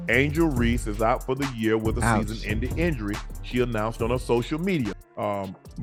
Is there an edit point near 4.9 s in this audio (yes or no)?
no